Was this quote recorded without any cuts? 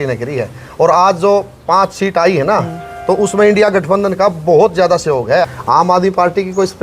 no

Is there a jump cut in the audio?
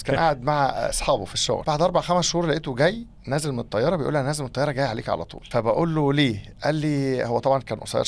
yes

